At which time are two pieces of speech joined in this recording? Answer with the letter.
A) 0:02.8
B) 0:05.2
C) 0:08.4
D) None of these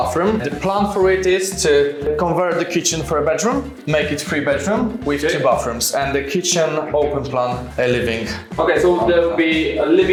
D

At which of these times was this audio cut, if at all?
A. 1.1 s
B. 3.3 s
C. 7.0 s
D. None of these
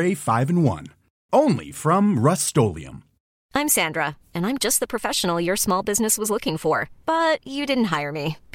B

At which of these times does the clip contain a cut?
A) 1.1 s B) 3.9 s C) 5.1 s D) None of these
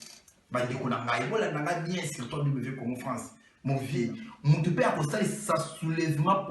B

